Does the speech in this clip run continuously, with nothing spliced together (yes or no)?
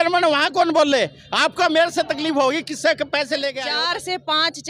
no